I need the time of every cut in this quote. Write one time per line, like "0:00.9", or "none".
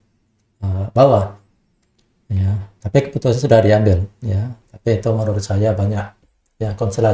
none